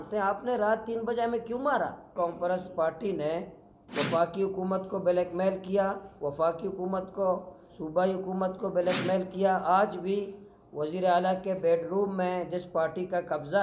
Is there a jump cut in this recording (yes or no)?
yes